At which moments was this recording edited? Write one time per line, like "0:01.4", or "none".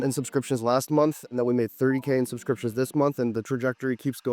none